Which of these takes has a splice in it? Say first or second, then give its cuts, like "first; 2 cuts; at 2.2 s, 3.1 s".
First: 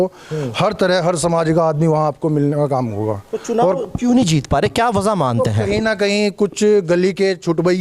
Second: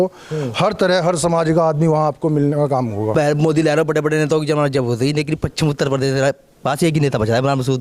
second; 1 cut; at 3.1 s